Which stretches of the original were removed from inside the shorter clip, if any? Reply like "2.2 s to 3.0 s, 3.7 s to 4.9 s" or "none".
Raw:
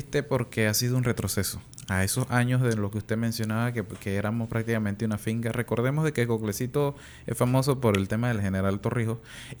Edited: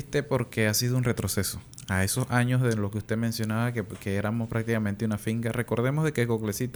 none